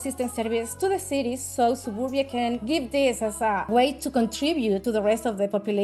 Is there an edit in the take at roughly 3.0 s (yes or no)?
no